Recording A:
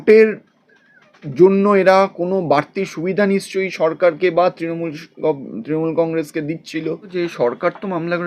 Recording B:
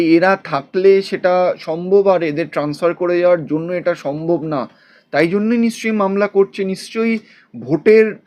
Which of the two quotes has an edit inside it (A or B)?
A